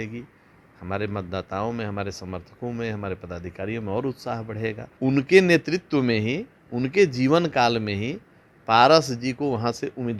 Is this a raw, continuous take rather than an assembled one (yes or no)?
no